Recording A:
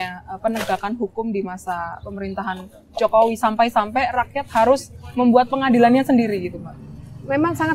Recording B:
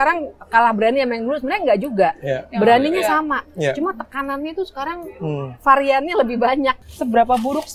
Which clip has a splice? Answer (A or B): B